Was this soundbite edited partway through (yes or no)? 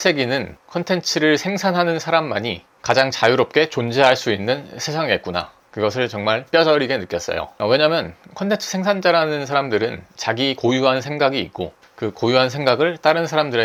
no